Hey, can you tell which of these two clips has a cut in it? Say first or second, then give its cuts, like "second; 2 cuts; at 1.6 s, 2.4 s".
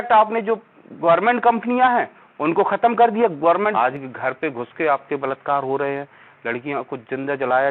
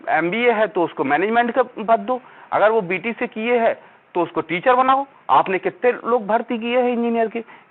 first; 1 cut; at 3.7 s